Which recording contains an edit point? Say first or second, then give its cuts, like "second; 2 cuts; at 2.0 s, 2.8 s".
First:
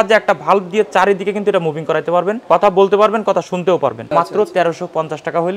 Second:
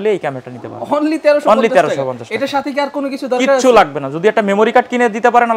first; 2 cuts; at 2.4 s, 4.0 s